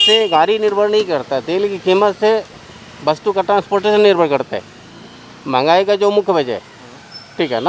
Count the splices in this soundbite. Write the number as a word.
zero